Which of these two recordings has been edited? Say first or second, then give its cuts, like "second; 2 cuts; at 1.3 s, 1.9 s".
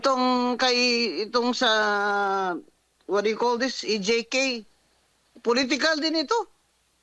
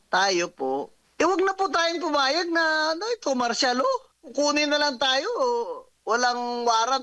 second; 3 cuts; at 1.0 s, 4.2 s, 5.9 s